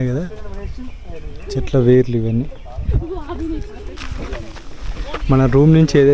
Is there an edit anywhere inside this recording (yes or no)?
yes